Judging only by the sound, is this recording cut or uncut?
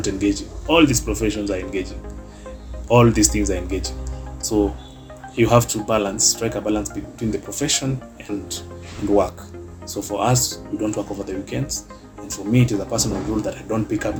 uncut